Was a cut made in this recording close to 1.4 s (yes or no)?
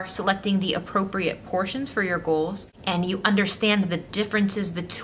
no